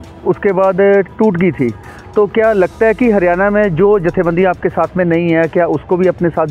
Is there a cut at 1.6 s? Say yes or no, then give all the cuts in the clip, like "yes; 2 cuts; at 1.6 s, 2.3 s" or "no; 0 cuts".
no; 0 cuts